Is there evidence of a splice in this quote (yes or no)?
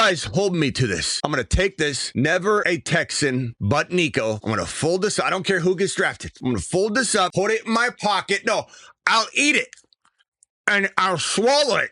yes